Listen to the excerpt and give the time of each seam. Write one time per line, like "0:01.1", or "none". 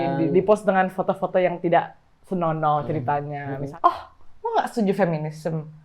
0:03.5